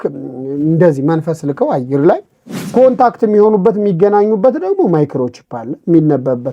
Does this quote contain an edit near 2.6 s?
yes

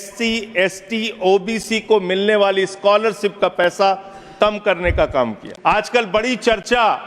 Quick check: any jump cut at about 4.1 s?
no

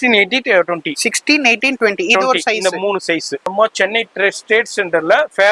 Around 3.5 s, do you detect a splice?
yes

